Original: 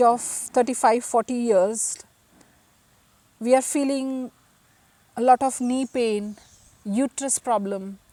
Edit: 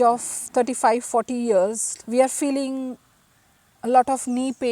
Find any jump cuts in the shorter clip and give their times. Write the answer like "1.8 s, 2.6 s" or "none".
1.9 s